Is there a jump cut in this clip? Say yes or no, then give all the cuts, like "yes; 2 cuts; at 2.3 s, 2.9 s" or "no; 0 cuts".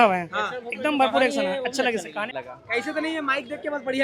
yes; 1 cut; at 2.4 s